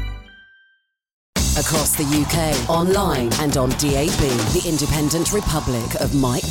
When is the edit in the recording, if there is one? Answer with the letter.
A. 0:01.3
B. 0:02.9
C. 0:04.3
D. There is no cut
A